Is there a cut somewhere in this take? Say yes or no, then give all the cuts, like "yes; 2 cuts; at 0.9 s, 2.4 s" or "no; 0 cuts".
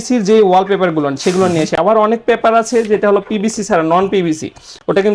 no; 0 cuts